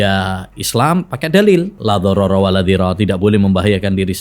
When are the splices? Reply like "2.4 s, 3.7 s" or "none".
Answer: 1.7 s

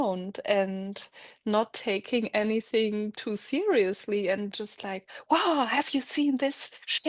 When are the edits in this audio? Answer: none

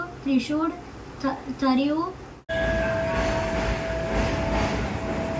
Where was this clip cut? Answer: 2.4 s

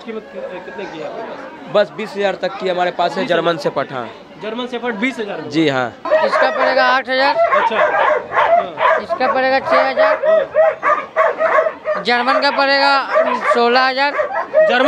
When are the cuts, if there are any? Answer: 6.0 s

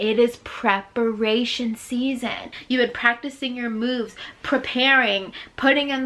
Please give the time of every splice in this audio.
2.5 s

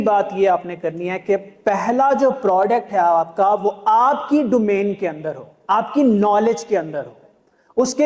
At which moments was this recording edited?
none

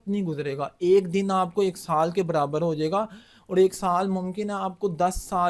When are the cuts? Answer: none

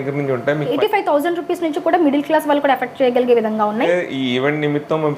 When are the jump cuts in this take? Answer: 0.7 s, 3.9 s

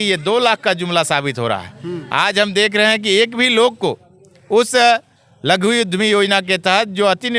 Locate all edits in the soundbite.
none

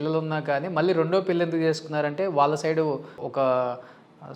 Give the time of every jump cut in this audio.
3.2 s

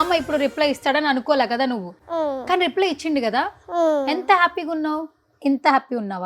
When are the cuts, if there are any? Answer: 1.9 s

